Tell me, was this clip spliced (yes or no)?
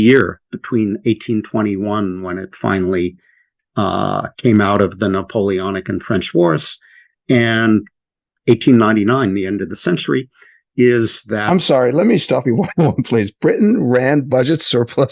no